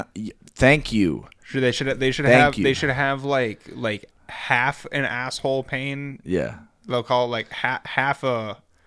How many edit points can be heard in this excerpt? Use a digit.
0